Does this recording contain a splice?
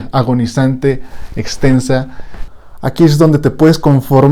yes; 1 cut; at 2.4 s

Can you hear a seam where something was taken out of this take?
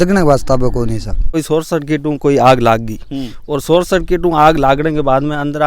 yes; 1 cut; at 1.4 s

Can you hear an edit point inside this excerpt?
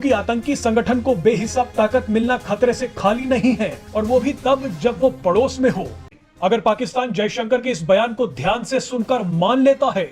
yes; 1 cut; at 6.0 s

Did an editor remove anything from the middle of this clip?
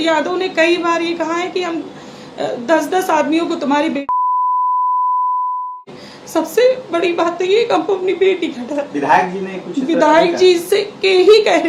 no; 0 cuts

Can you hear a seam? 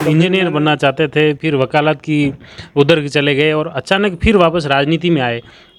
no; 0 cuts

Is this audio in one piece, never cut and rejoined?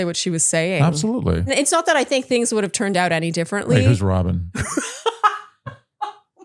no; 1 cut; at 1.5 s

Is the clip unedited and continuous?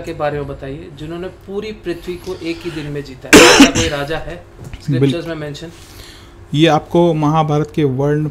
yes; 0 cuts

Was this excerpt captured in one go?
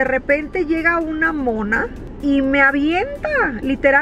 no; 1 cut; at 2.2 s

